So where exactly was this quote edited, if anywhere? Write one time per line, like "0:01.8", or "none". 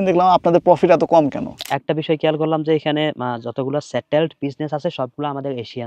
0:01.7